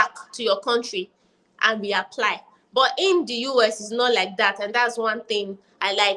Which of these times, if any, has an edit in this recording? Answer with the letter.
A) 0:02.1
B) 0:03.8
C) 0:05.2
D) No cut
D